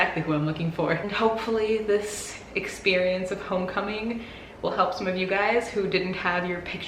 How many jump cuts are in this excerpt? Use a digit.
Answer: 1